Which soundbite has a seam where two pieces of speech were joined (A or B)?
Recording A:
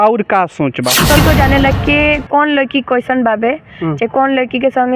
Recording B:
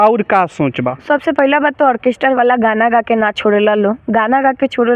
A